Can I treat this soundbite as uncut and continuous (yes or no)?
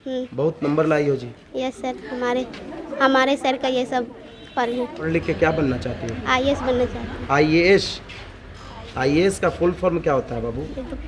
no